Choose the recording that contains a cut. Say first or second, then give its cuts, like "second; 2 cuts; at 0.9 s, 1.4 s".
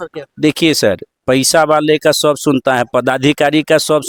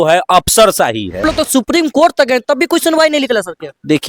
second; 1 cut; at 1.2 s